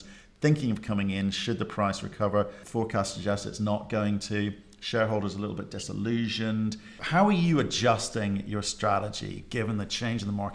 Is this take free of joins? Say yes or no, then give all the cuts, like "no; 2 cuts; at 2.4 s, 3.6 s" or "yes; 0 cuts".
no; 2 cuts; at 2.6 s, 6.9 s